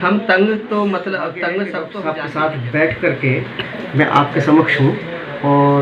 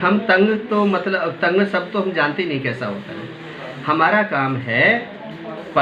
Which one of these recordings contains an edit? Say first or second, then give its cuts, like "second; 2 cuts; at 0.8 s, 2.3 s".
first; 1 cut; at 1.9 s